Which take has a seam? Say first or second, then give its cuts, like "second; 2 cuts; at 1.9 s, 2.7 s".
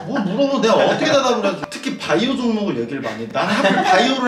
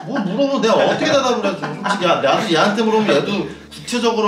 first; 1 cut; at 1.7 s